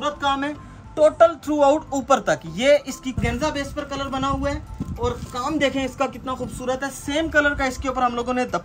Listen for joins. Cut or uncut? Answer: cut